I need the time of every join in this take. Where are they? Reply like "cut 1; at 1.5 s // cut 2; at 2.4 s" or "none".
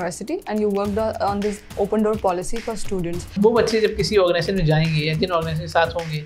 cut 1; at 3.4 s